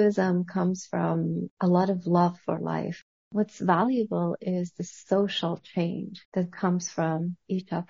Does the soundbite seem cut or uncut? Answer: cut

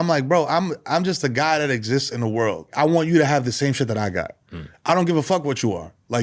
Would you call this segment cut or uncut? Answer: cut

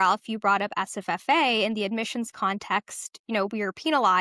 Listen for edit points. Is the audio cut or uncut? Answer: uncut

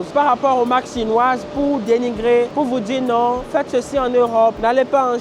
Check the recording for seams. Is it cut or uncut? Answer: uncut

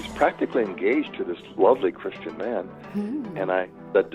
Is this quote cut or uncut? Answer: uncut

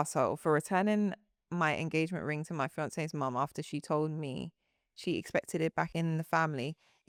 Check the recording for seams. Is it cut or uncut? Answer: uncut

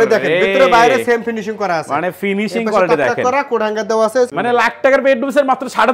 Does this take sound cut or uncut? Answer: cut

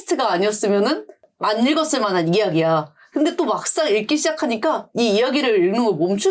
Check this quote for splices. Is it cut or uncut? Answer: uncut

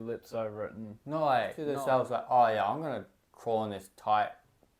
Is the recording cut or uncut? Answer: cut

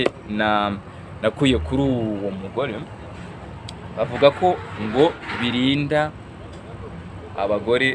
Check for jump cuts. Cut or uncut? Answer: uncut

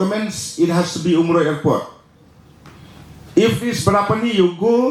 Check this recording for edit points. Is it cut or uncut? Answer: uncut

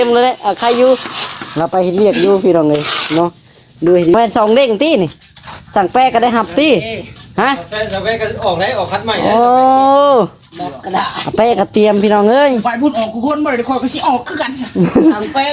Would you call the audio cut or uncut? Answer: cut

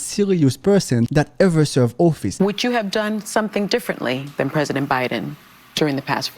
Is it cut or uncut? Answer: cut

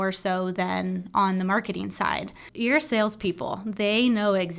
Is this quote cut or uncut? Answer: cut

